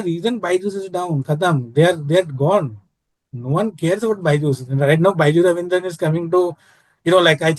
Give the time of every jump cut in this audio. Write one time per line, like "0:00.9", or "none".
none